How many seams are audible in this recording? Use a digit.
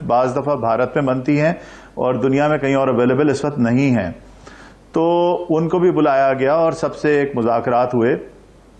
0